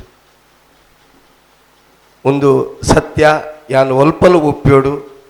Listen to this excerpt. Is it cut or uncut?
uncut